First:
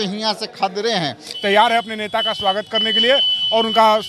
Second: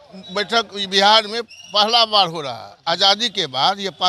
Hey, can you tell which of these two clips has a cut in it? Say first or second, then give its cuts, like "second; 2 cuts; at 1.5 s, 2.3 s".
first; 1 cut; at 1.4 s